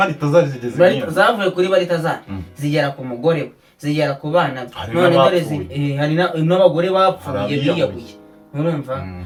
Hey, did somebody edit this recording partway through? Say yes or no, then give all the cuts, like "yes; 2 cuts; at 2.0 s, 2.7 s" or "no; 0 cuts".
no; 0 cuts